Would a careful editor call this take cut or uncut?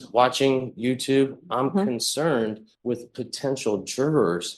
cut